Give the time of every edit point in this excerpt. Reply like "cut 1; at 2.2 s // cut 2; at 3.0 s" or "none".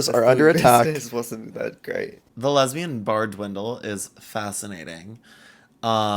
cut 1; at 2.2 s